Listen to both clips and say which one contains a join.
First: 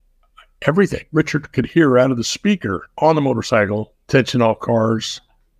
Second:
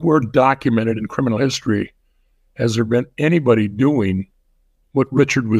first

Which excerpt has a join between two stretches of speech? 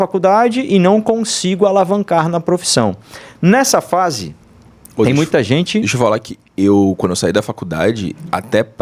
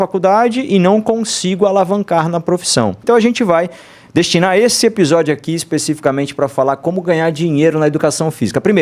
second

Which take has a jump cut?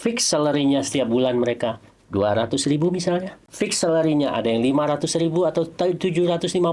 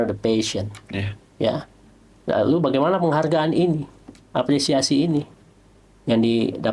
first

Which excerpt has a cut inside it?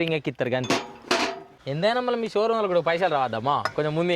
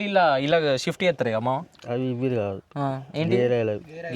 first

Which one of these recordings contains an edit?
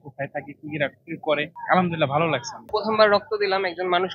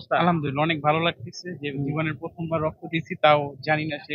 first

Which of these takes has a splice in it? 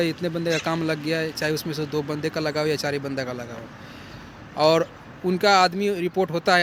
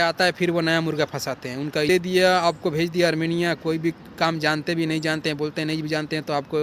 second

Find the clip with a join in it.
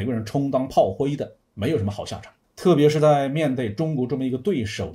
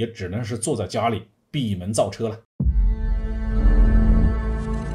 second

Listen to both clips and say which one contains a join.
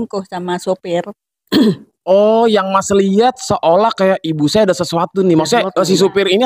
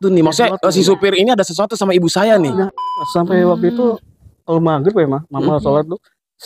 second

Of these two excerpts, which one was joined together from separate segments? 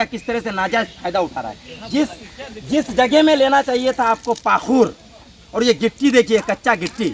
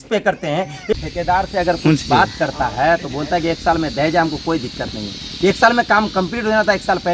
second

